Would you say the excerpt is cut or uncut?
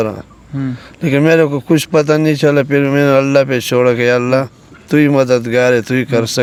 uncut